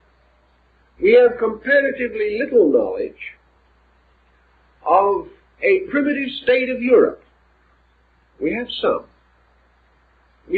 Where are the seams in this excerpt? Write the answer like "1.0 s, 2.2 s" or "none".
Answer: 5.4 s